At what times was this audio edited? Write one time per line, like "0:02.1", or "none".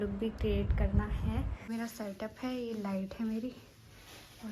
0:01.7